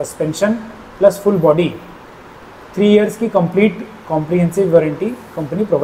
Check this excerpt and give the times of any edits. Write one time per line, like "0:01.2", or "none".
none